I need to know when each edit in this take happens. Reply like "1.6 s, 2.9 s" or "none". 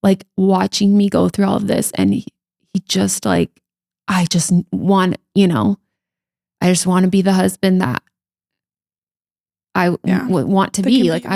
none